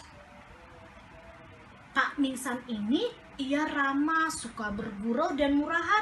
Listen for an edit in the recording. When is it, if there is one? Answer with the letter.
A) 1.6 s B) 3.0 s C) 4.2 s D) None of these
D